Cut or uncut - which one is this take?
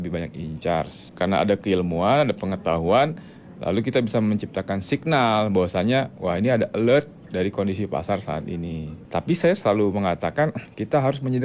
cut